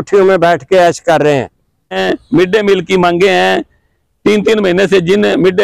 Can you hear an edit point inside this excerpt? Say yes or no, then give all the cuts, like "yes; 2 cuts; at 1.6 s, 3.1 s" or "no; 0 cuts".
yes; 1 cut; at 2.0 s